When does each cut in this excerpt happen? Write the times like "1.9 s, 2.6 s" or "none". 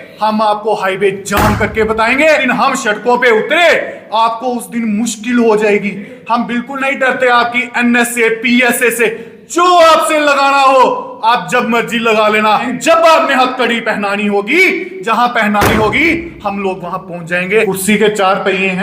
2.4 s, 6.1 s, 12.7 s, 17.7 s